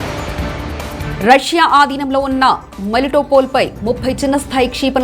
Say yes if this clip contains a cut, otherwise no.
yes